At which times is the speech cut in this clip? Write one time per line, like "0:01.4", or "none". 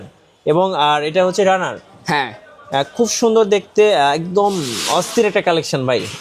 none